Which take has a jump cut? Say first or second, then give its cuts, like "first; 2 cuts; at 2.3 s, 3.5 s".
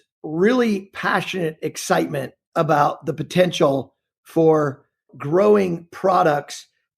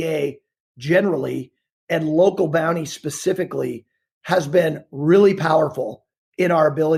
first; 1 cut; at 5.1 s